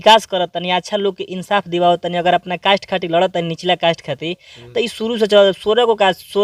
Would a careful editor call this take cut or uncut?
uncut